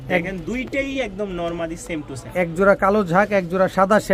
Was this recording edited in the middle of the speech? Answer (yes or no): no